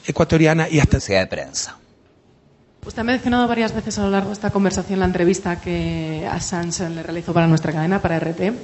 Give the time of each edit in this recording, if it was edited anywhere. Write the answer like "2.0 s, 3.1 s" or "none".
none